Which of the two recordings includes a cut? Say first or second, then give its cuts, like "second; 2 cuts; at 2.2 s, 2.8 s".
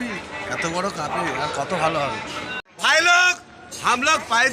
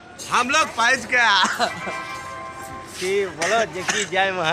first; 1 cut; at 2.6 s